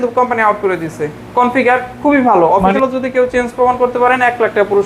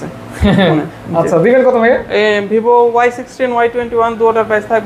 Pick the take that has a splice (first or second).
first